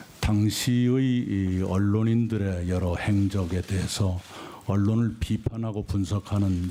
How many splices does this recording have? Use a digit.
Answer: 0